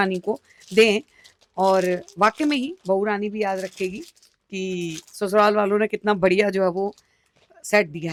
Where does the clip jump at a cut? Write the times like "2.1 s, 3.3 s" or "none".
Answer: none